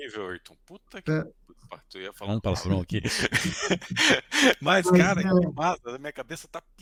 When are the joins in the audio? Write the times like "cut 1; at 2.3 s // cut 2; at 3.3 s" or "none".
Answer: none